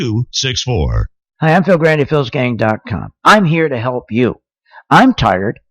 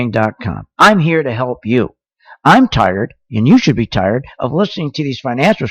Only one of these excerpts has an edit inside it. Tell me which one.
first; 1 cut; at 1.2 s

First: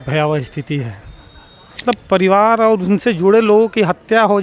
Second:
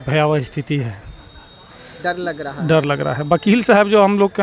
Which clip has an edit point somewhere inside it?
first; 1 cut; at 1.8 s

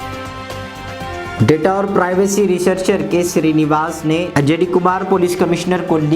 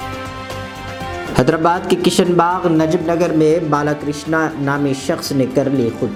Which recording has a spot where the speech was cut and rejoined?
first; 1 cut; at 1.2 s

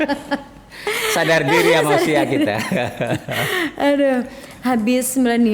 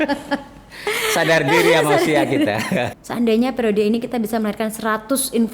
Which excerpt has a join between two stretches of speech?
second; 1 cut; at 2.9 s

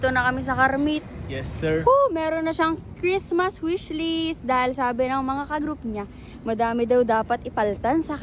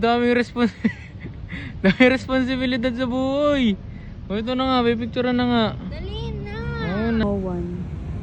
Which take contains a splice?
second; 1 cut; at 7.2 s

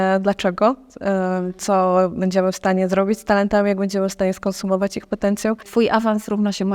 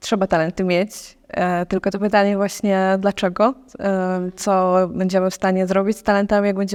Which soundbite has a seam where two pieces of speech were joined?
first; 1 cut; at 5.7 s

